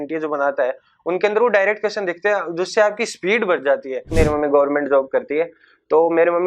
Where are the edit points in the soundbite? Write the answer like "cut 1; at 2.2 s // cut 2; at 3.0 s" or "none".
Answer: cut 1; at 4.1 s